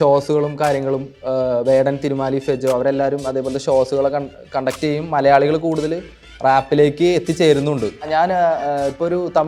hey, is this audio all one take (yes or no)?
no